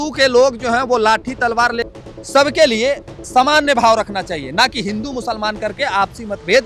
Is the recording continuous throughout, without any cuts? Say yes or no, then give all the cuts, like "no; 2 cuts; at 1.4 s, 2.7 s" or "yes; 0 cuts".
no; 1 cut; at 1.9 s